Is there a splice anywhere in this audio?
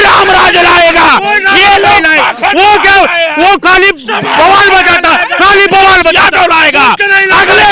no; 0 cuts

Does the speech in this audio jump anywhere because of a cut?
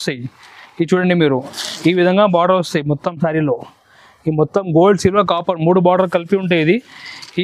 no; 0 cuts

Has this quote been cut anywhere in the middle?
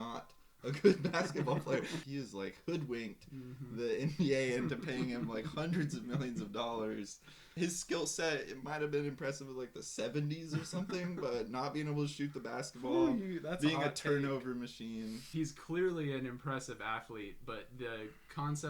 yes; 3 cuts; at 2.1 s, 7.5 s, 15.3 s

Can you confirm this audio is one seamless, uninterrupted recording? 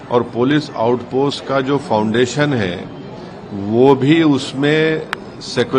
yes; 0 cuts

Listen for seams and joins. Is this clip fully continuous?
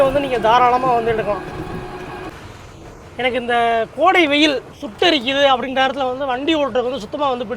no; 1 cut; at 2.3 s

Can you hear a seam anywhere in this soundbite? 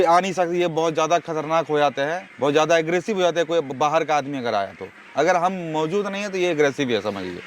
no; 0 cuts

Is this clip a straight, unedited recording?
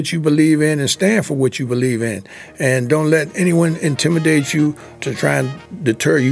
yes; 0 cuts

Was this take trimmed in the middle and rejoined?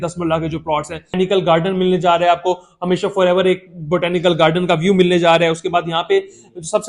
yes; 1 cut; at 1.1 s

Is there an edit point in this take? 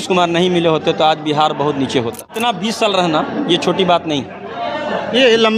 yes; 1 cut; at 2.4 s

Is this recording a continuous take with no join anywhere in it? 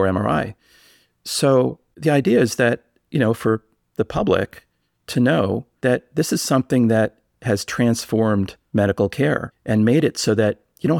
no; 4 cuts; at 1.9 s, 5.7 s, 8.6 s, 9.5 s

